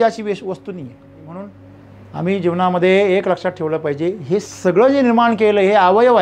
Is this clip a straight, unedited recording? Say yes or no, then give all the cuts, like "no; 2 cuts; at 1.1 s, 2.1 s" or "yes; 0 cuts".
no; 1 cut; at 1.4 s